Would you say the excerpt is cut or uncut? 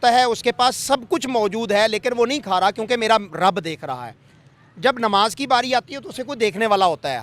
uncut